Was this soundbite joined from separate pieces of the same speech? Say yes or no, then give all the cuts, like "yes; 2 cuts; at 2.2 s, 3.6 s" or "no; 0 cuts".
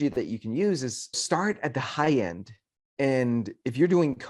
yes; 1 cut; at 1.1 s